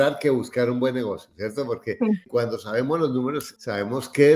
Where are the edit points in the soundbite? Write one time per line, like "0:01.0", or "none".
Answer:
none